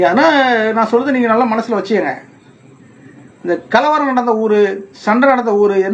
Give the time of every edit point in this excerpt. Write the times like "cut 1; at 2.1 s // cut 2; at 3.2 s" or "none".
none